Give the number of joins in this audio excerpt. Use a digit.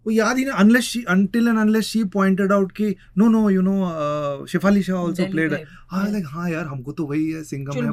0